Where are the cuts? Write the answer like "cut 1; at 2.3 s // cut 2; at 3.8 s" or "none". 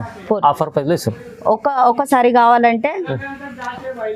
none